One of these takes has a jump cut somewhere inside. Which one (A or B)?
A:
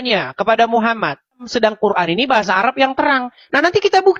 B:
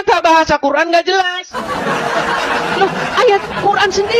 A